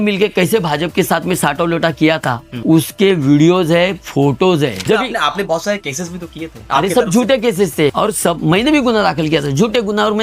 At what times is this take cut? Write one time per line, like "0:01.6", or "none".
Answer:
0:04.8
0:07.9